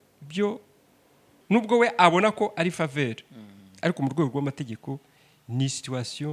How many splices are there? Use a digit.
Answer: 1